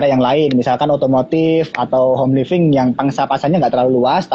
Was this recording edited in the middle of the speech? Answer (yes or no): no